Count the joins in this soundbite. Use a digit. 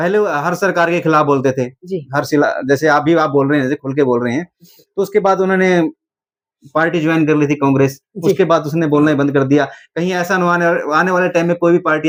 0